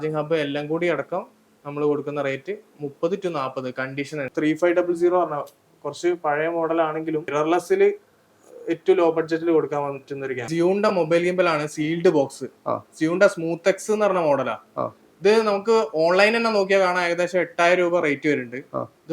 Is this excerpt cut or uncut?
cut